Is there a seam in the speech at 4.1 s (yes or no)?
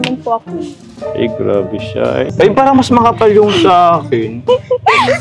no